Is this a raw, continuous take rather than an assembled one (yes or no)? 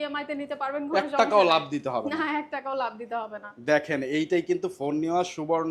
yes